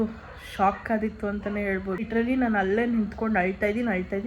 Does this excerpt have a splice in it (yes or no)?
yes